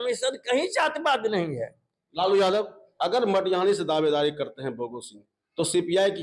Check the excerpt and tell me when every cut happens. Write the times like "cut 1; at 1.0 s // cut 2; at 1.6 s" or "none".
cut 1; at 2.8 s